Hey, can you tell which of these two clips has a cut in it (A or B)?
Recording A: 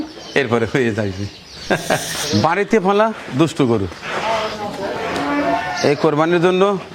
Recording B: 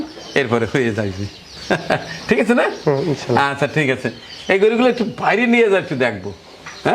A